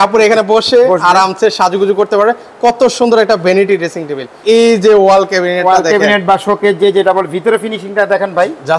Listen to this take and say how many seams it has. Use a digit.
1